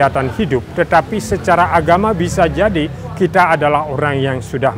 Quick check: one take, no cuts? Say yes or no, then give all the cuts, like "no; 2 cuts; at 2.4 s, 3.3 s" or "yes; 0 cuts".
yes; 0 cuts